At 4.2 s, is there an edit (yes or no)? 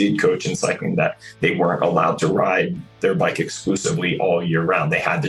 no